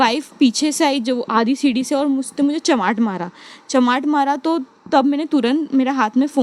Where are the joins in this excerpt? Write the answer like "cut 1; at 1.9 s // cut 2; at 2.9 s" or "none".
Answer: none